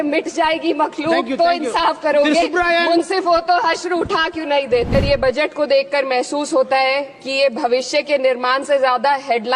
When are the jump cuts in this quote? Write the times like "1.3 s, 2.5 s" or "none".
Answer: 5.0 s